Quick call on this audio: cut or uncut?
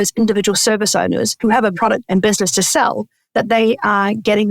cut